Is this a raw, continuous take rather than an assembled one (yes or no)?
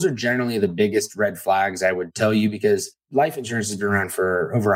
no